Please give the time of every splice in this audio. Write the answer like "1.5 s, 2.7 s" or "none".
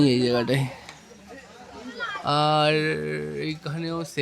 none